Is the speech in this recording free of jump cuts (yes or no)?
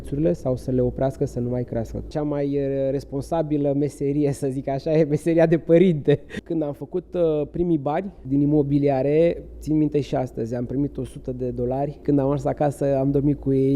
no